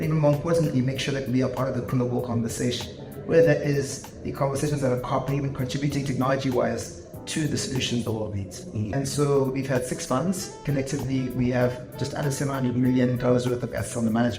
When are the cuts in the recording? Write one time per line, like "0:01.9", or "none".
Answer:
0:08.9

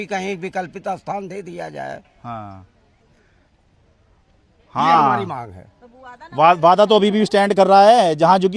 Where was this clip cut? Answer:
none

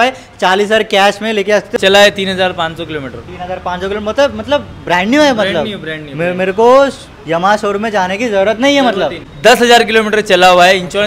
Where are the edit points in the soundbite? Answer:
0:01.7
0:09.2

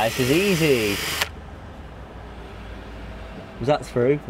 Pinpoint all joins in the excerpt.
none

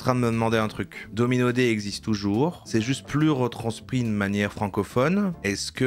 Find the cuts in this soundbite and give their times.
none

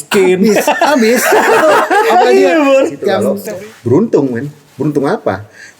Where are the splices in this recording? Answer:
0:03.3

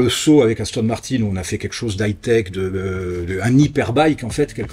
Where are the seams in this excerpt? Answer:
none

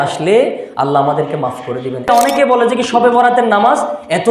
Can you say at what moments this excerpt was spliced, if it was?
0:02.1

